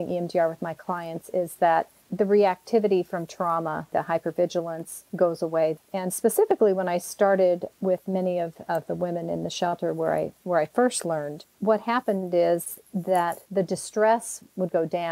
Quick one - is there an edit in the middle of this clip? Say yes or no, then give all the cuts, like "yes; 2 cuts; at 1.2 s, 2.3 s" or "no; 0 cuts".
no; 0 cuts